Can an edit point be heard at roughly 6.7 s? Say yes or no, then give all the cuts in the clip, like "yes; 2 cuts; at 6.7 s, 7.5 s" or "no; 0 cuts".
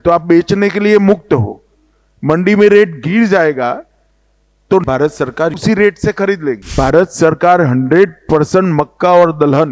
yes; 1 cut; at 6.7 s